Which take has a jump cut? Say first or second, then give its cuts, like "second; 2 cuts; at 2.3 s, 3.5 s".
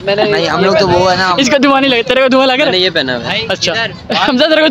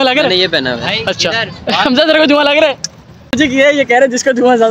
second; 1 cut; at 3.3 s